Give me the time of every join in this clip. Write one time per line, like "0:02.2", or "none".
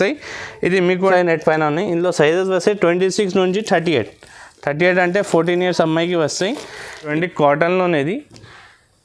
0:01.1
0:06.9